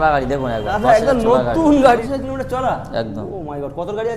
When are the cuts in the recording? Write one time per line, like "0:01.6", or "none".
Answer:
0:02.0